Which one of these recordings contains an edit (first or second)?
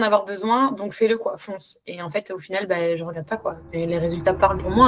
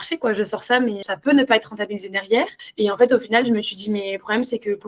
second